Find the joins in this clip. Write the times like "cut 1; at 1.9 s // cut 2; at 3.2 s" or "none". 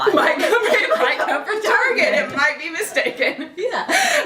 none